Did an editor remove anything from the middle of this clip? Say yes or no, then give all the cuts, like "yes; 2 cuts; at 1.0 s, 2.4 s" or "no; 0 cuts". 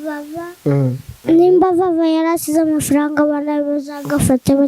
yes; 1 cut; at 1.1 s